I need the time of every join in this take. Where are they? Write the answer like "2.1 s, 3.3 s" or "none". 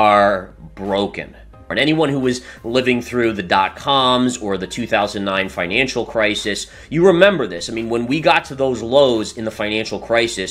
1.7 s